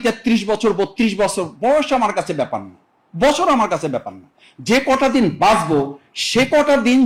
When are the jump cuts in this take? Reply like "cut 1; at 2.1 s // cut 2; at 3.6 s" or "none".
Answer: none